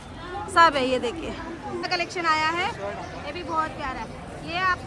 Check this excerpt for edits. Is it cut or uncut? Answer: cut